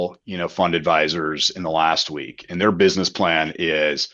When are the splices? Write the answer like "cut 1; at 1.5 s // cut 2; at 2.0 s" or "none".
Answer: none